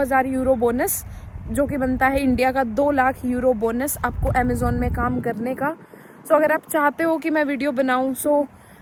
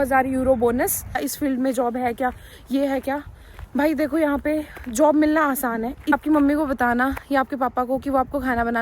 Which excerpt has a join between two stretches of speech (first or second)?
second